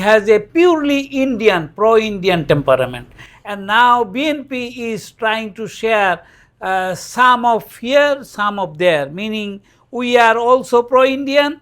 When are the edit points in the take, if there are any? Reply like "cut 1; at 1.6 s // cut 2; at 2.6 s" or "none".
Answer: none